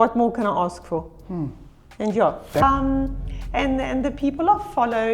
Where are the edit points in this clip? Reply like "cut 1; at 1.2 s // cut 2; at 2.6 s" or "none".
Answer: cut 1; at 2.6 s